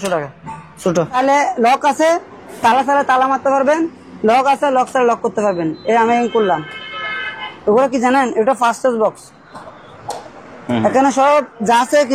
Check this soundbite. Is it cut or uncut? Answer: cut